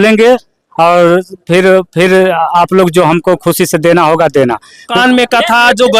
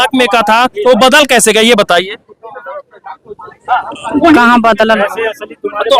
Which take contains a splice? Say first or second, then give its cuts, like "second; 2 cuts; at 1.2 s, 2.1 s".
first; 1 cut; at 5.0 s